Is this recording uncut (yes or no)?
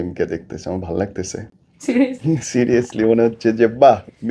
yes